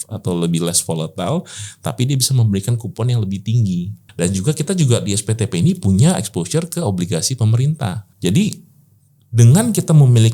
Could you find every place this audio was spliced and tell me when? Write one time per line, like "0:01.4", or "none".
0:04.0
0:08.1

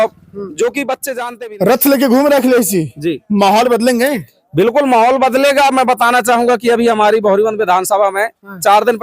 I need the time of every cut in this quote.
0:01.2

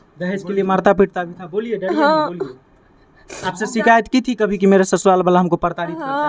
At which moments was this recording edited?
none

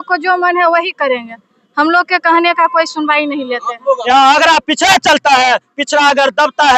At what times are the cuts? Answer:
0:04.0

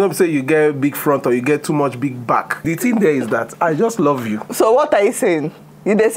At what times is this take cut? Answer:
0:02.6
0:04.4

